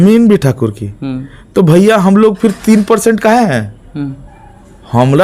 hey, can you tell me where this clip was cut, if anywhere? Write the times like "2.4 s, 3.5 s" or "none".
none